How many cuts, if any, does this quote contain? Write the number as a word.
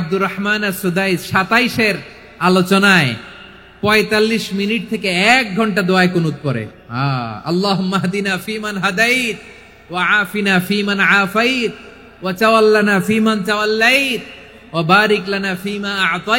one